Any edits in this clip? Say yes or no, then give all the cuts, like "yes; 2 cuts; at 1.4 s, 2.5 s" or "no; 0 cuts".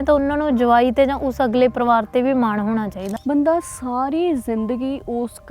yes; 1 cut; at 3.0 s